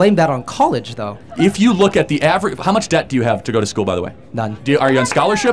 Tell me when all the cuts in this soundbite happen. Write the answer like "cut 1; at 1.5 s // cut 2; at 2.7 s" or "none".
cut 1; at 1.1 s // cut 2; at 4.5 s